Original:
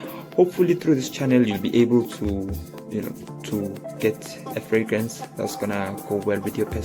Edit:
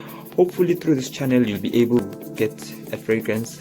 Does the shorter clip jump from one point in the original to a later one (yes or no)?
yes